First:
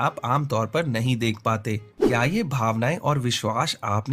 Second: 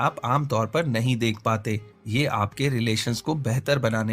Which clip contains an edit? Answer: first; 1 cut; at 1.9 s

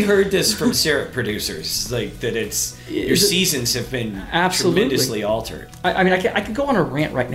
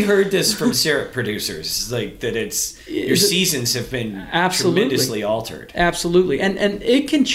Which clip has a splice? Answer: first; 1 cut; at 5.6 s

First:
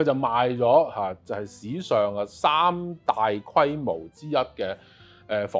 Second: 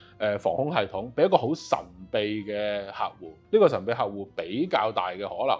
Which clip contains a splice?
second; 1 cut; at 3.4 s

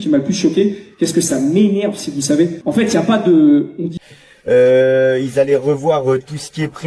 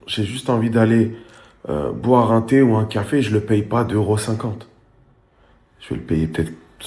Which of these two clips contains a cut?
first; 1 cut; at 4.0 s

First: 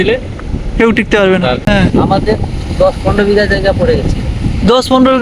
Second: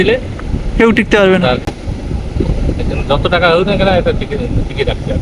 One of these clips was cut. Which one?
first; 1 cut; at 1.6 s

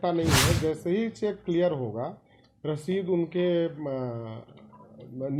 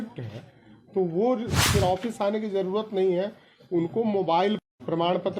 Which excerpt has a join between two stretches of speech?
second; 1 cut; at 1.6 s

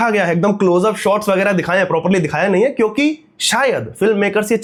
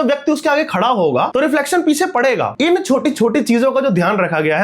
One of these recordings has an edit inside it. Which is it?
second; 2 cuts; at 1.3 s, 2.5 s

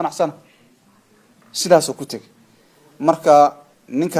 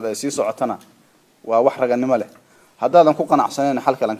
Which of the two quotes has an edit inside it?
second; 1 cut; at 1.4 s

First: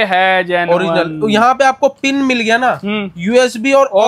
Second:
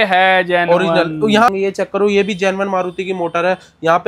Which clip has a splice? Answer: second; 1 cut; at 1.5 s

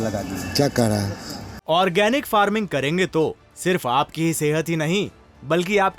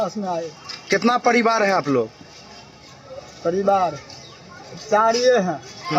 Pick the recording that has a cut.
first; 1 cut; at 1.4 s

